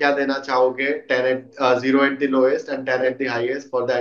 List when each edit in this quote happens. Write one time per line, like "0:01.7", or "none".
none